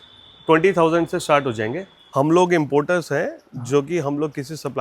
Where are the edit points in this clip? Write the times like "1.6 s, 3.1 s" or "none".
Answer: 2.0 s